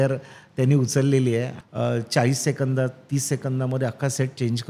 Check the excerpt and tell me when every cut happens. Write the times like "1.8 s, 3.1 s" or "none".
1.6 s